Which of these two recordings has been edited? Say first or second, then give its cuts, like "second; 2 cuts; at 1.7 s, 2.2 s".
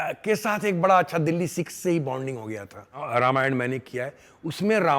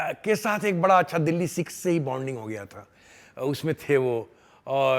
first; 1 cut; at 3.0 s